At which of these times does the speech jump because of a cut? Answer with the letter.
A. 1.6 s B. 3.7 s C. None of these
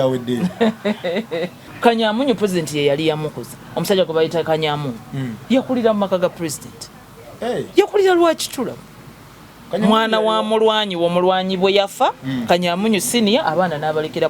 A